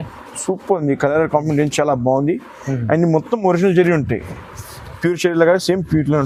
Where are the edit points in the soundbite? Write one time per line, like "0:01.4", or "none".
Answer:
none